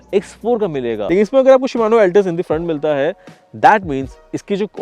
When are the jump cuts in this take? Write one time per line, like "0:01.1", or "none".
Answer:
0:01.0

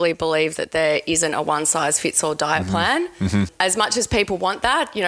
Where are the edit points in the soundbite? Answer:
0:03.5

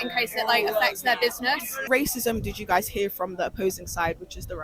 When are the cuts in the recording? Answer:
0:01.8

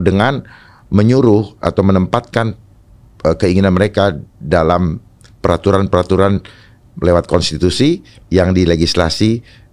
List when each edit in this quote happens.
none

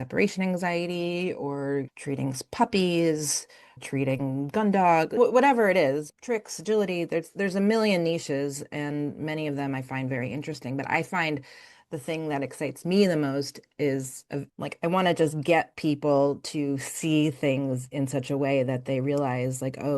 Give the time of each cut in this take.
0:01.9
0:03.8
0:05.2
0:06.1
0:14.5

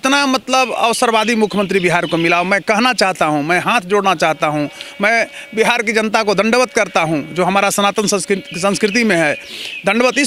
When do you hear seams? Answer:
none

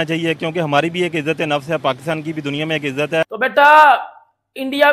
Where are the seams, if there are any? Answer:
0:03.2

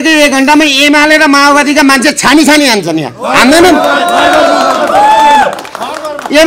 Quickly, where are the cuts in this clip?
none

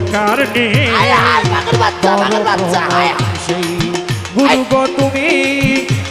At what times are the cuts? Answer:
none

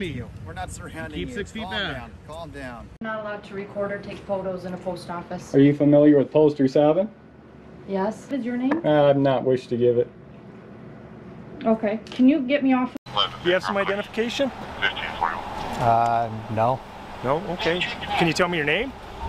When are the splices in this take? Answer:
0:02.9
0:08.3
0:13.0

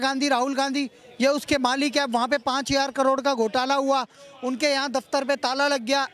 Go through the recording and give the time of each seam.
none

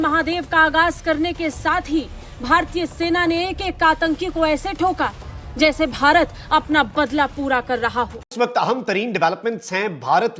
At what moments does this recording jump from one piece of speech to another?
0:08.5

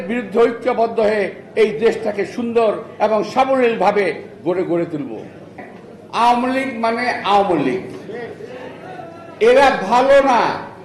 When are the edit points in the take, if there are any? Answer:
0:05.6

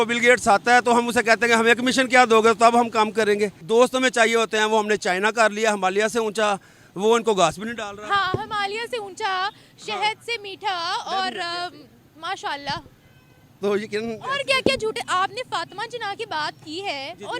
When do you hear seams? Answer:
0:03.6

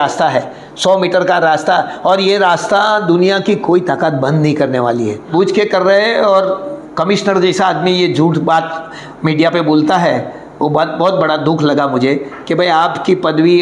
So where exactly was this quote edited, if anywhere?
0:05.3

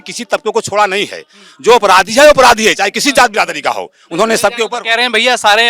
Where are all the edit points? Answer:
none

